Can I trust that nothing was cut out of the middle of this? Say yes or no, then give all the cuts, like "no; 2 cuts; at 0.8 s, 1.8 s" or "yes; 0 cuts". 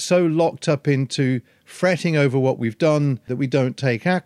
no; 1 cut; at 3.3 s